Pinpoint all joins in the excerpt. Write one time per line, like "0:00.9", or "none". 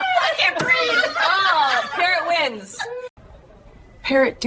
0:03.3